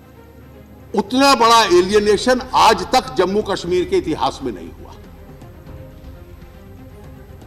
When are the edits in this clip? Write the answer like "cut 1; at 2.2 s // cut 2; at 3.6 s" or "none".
none